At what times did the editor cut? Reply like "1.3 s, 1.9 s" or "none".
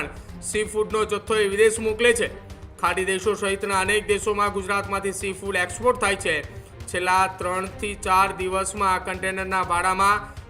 none